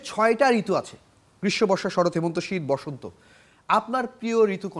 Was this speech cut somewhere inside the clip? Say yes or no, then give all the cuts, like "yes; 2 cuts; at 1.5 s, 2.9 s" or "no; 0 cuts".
no; 0 cuts